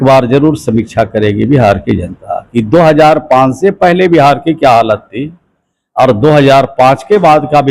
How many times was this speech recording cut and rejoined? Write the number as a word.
zero